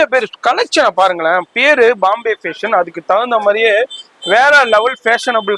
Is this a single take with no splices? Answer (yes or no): yes